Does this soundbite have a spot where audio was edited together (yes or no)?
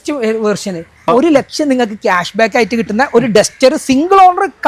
yes